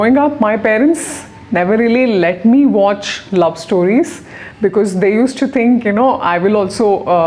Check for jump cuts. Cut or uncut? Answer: uncut